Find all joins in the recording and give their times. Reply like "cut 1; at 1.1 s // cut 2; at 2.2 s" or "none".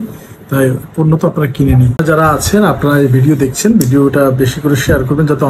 cut 1; at 2.0 s